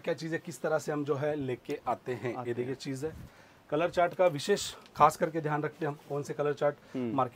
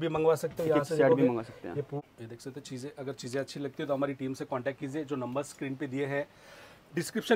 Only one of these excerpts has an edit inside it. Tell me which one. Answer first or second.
second